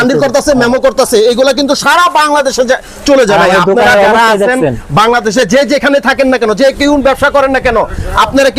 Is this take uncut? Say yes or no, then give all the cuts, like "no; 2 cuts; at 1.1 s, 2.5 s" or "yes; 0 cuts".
yes; 0 cuts